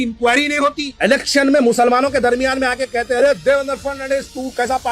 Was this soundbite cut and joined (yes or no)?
yes